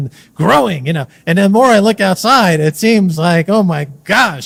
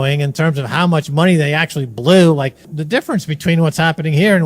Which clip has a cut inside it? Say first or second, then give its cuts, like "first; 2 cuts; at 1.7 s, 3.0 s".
second; 1 cut; at 2.7 s